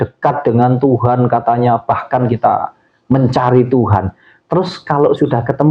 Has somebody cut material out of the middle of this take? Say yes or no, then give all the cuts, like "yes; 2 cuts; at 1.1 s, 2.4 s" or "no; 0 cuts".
no; 0 cuts